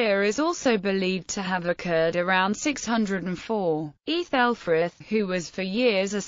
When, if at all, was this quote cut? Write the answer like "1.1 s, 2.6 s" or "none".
3.9 s